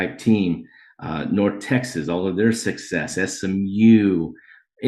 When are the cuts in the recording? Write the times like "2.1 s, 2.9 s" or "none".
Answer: none